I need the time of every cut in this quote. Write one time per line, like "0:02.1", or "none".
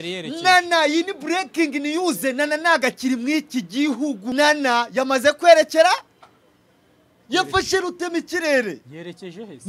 0:04.3